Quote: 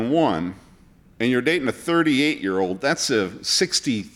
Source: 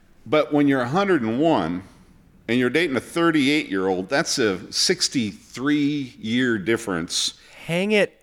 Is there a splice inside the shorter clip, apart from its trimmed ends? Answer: no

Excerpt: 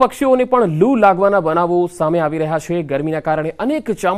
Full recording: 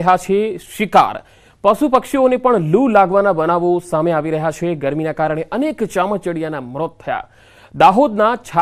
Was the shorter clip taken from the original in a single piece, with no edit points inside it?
yes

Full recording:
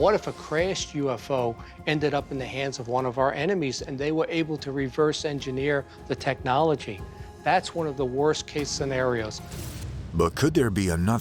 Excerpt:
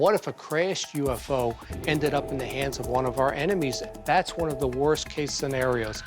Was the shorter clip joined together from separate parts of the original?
yes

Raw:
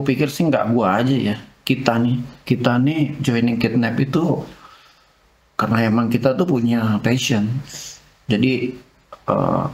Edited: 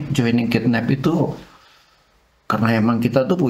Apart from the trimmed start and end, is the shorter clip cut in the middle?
no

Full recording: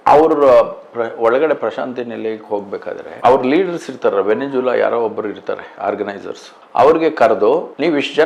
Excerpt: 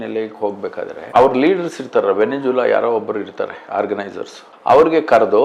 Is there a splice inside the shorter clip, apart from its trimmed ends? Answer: no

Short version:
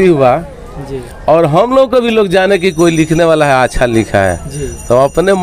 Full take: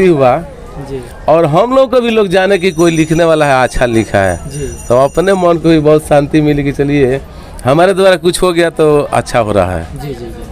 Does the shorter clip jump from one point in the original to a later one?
no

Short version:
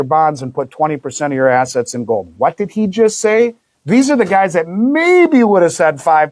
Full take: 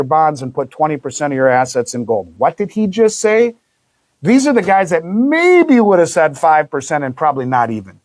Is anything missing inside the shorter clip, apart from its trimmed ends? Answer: yes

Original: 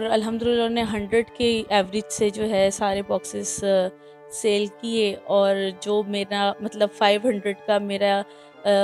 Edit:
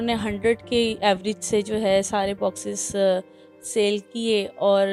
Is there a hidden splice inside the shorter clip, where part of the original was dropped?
no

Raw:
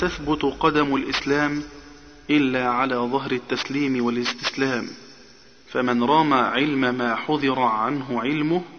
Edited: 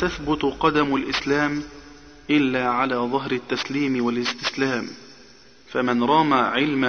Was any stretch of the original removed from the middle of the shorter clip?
no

